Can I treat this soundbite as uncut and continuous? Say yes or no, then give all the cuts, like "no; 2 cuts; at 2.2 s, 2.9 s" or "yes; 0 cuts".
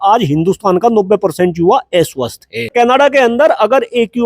no; 1 cut; at 2.7 s